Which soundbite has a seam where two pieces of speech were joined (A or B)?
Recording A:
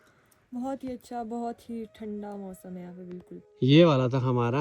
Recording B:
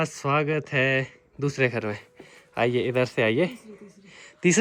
A